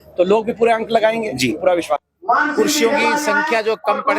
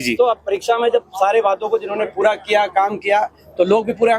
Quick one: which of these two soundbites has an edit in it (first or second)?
first